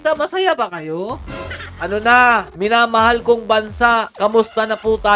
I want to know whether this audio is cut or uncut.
cut